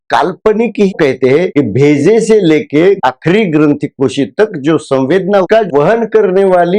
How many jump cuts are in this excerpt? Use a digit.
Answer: 2